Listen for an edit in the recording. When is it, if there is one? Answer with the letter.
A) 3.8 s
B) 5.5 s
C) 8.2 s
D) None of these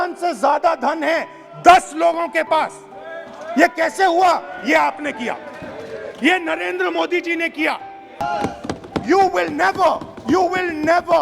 C